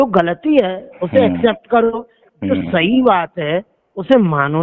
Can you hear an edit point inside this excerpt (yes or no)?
no